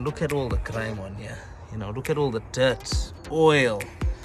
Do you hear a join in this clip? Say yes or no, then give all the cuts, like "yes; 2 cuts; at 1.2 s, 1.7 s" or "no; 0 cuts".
no; 0 cuts